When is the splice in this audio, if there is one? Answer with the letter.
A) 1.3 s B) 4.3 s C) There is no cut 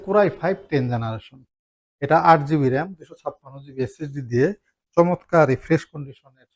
C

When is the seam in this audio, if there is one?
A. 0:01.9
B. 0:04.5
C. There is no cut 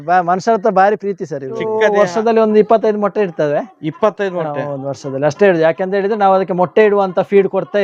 A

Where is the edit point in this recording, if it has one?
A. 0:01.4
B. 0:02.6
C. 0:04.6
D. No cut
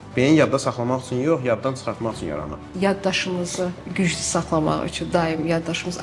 B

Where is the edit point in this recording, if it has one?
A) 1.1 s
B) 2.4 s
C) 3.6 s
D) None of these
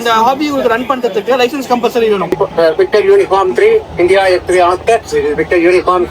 B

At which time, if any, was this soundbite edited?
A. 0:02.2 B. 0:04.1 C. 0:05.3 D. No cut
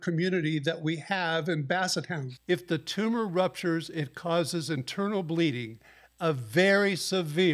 A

